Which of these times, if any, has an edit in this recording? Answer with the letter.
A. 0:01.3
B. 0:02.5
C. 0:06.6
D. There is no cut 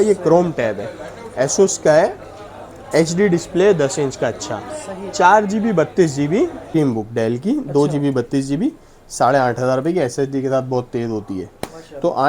C